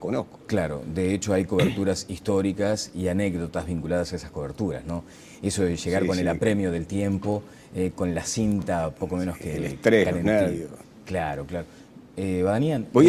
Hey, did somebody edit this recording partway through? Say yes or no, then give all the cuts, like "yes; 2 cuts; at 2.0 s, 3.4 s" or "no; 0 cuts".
yes; 1 cut; at 1.4 s